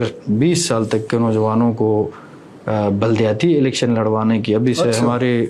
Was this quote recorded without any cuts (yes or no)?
yes